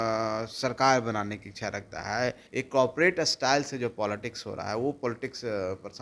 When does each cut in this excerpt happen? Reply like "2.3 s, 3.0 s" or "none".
2.4 s